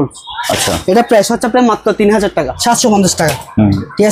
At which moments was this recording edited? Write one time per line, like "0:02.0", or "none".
0:02.6